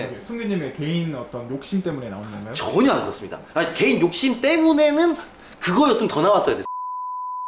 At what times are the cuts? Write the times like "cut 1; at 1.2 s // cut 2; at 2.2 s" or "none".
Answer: none